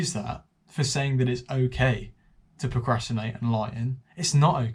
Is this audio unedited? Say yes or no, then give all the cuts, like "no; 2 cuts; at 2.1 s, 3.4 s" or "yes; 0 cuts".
yes; 0 cuts